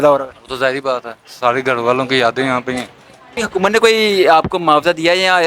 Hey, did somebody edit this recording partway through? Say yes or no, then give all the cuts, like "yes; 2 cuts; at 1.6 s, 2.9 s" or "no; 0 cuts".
yes; 1 cut; at 3.4 s